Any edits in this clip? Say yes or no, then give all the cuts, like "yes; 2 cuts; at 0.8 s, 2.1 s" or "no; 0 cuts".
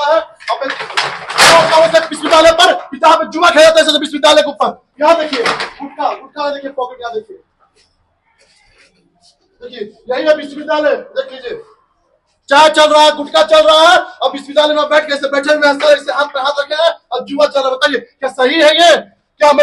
no; 0 cuts